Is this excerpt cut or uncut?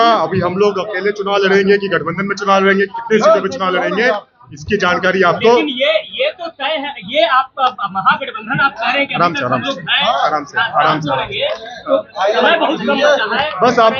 uncut